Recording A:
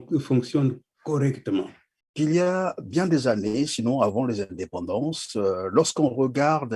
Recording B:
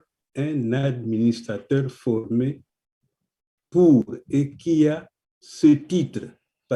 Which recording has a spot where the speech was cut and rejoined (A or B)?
A